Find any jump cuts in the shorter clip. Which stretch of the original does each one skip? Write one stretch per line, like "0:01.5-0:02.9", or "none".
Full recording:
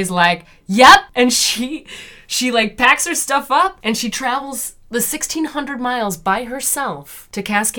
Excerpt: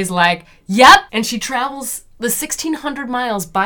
0:01.1-0:03.8